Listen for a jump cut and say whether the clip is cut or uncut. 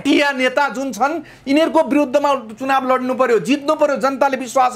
uncut